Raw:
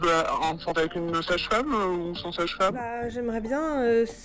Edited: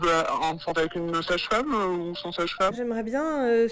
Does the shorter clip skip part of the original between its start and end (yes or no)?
yes